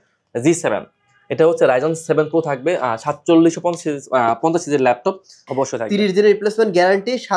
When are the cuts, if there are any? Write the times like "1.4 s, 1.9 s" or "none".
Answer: 5.4 s